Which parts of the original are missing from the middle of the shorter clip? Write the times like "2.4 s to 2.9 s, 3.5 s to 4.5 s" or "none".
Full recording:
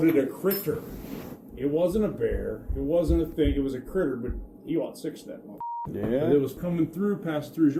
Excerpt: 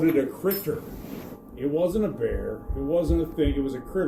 none